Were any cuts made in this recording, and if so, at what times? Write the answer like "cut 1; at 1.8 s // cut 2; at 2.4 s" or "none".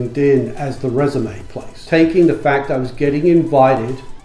cut 1; at 1.8 s